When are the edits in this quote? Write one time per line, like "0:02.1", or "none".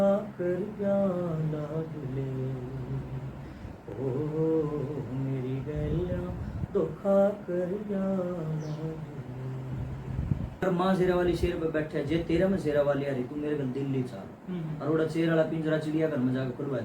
0:10.6